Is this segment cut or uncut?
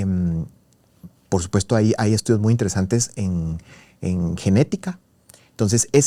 uncut